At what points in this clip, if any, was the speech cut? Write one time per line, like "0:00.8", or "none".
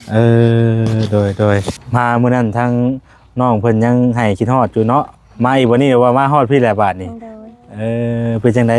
0:01.8